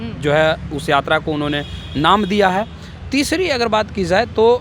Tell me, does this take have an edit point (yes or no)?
no